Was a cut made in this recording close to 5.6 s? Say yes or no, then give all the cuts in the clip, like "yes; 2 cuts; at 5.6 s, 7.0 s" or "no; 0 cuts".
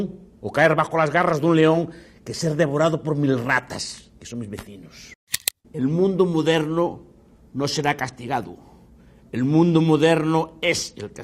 yes; 1 cut; at 5.6 s